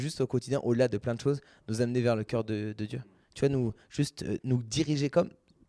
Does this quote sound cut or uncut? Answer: uncut